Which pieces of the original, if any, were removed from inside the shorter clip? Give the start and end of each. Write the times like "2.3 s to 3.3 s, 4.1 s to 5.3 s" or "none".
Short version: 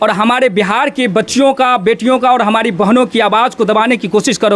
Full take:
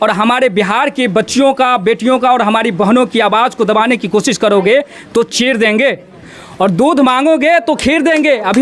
none